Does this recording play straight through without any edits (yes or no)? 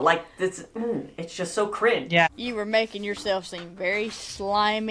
no